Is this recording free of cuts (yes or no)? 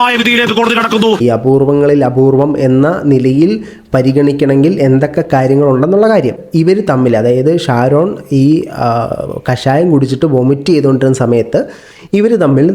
no